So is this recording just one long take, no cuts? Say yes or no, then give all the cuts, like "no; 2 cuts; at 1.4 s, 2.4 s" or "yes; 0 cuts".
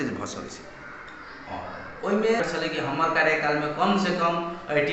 no; 1 cut; at 2.4 s